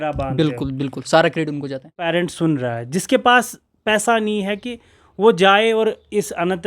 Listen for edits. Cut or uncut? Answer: cut